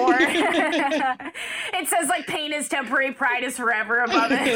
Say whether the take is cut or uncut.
uncut